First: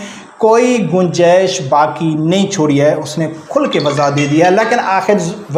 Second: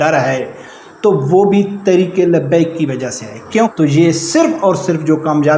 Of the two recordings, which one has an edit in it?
second; 1 cut; at 3.7 s

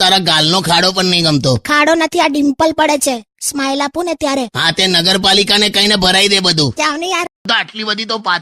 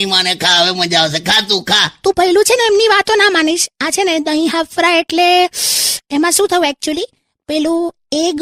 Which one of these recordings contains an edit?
first; 1 cut; at 7.3 s

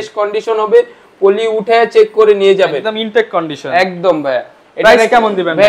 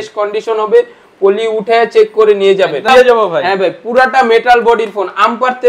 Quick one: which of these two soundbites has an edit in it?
second; 1 cut; at 2.9 s

